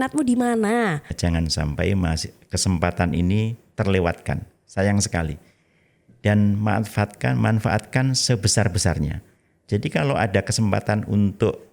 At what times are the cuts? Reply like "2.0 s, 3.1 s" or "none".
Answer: 1.1 s